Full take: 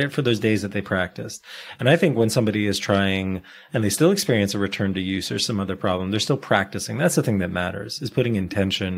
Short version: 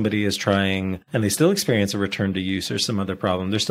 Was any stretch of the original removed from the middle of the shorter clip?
yes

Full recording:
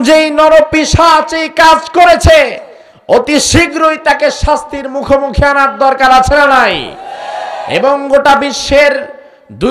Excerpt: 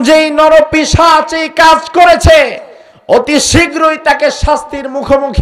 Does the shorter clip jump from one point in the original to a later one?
no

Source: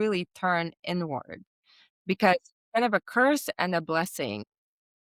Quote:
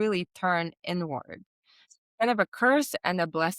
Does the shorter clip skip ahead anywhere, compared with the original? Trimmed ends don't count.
yes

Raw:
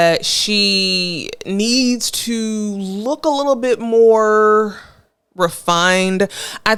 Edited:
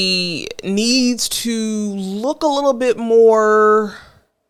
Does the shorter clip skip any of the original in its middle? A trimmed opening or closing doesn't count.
no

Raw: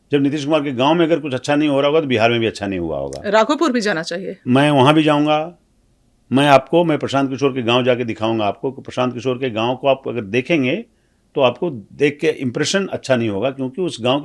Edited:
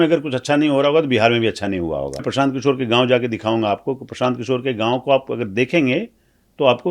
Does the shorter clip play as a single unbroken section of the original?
no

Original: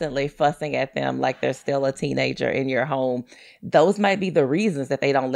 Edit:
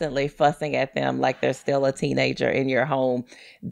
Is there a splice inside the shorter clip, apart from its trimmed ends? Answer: no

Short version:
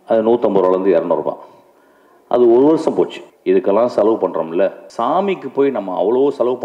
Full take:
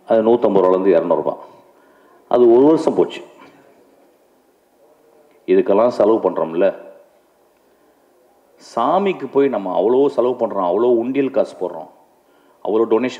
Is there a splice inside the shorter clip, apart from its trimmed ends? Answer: yes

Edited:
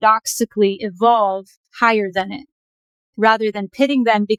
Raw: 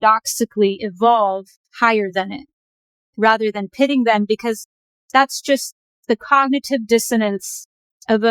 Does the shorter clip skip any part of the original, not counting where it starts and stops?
no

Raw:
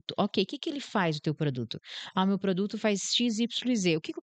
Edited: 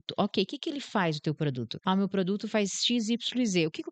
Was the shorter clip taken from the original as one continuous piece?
no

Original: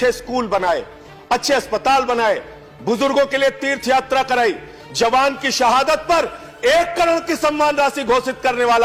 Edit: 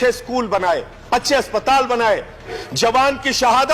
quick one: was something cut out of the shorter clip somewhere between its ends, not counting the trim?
yes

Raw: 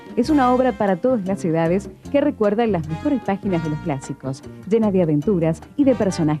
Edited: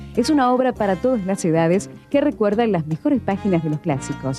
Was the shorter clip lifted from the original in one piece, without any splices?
yes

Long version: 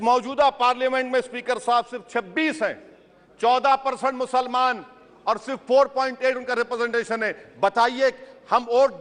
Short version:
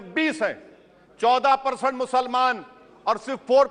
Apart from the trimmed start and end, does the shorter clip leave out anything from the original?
no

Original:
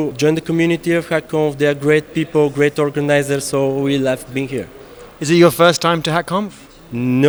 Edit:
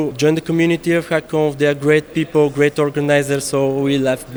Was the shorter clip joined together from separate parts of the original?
no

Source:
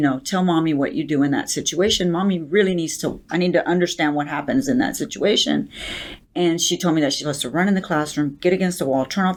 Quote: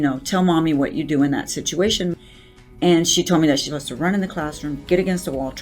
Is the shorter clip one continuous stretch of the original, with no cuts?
no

